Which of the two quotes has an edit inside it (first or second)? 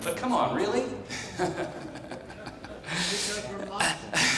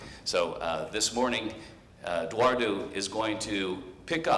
second